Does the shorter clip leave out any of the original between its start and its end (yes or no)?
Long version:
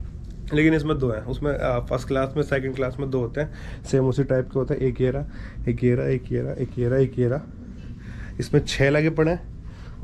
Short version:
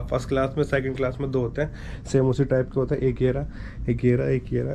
no